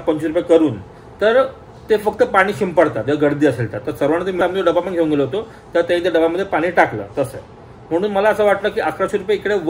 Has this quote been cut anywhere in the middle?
no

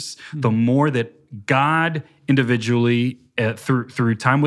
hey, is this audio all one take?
yes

